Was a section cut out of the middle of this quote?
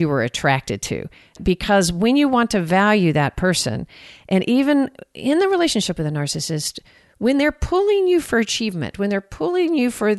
yes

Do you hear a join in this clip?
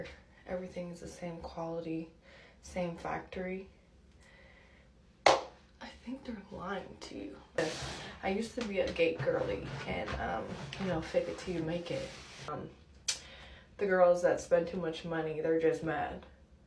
yes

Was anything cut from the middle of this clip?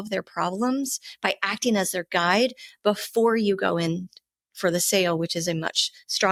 no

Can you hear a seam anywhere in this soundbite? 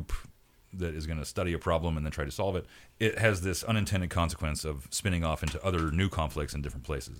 no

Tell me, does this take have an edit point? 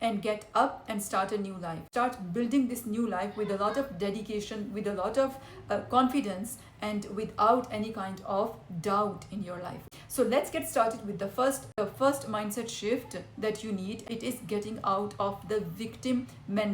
yes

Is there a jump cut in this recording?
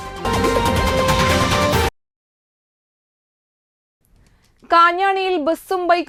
no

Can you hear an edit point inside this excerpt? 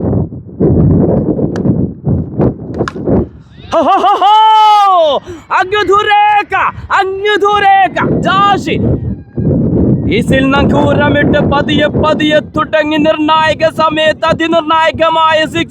no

